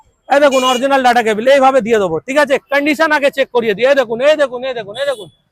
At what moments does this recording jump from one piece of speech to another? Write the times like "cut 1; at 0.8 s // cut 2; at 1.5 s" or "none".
none